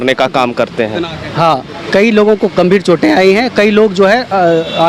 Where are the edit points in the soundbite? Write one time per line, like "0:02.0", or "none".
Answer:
0:01.1